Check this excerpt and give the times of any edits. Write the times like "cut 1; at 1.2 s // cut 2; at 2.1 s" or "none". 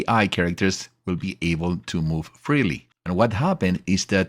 cut 1; at 2.9 s

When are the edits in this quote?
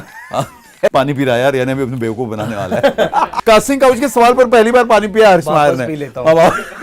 cut 1; at 0.9 s // cut 2; at 3.3 s

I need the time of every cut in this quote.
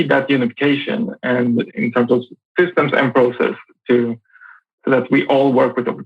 cut 1; at 1.7 s

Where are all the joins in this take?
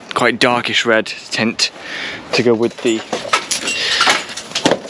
cut 1; at 3.0 s

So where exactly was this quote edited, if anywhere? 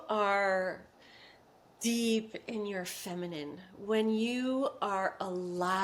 none

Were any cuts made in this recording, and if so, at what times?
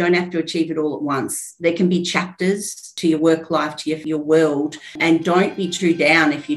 cut 1; at 2.9 s // cut 2; at 4.0 s // cut 3; at 5.0 s

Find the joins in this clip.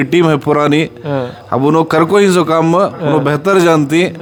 none

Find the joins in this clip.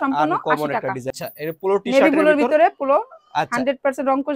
cut 1; at 1.2 s

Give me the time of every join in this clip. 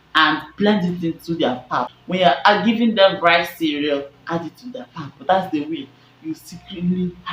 cut 1; at 2.0 s

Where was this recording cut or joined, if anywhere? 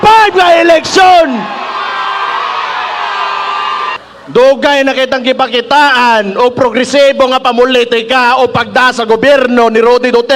cut 1; at 4.0 s

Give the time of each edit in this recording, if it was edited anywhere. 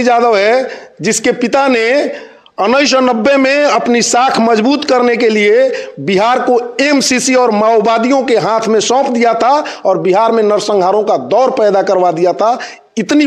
none

